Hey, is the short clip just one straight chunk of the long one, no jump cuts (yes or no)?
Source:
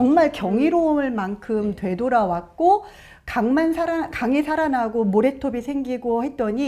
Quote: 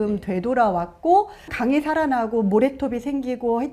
no